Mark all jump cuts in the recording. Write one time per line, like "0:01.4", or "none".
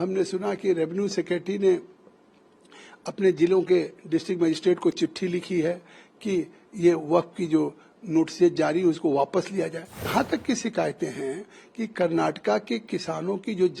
0:10.1

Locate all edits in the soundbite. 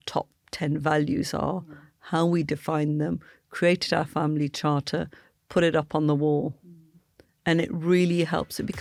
none

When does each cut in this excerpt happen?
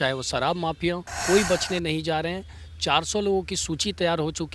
0:01.1

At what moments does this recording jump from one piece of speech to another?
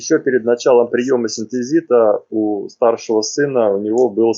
none

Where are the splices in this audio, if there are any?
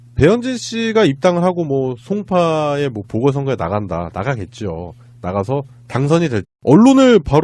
none

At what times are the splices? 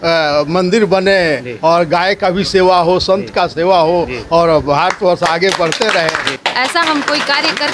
0:06.3

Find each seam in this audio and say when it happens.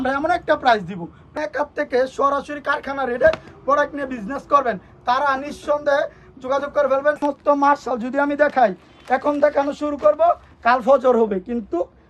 0:01.3
0:07.1

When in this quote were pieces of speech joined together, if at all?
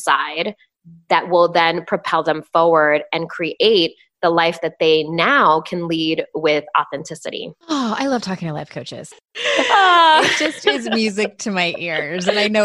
0:07.5
0:08.8

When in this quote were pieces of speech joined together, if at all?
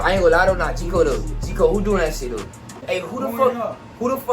0:02.8

